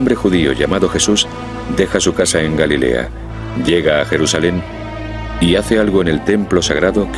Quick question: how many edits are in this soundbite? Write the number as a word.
zero